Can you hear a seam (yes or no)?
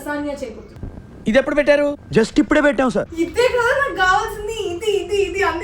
yes